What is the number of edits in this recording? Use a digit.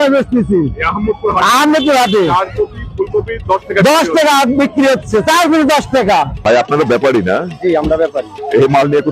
1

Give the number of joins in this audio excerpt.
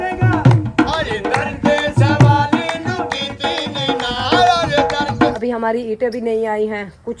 1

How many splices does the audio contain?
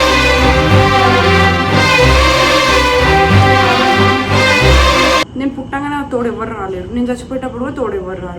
1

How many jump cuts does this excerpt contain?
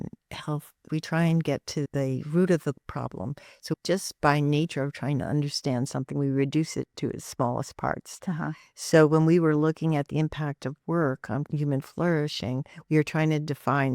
1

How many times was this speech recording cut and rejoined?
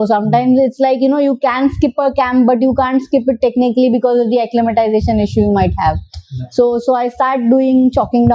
0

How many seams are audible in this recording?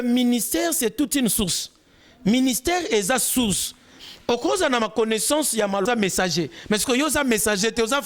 1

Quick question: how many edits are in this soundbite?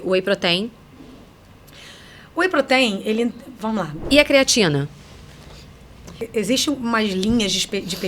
2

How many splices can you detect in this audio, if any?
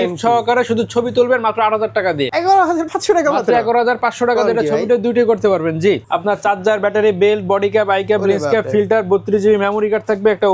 2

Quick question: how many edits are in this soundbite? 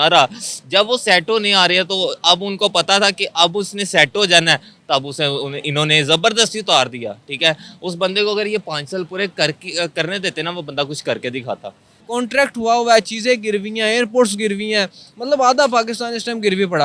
1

